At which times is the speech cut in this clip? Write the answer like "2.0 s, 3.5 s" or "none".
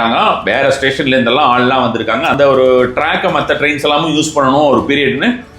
2.3 s